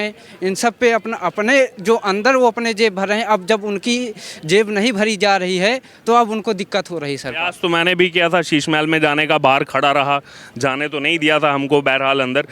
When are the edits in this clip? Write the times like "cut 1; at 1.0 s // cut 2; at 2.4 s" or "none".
none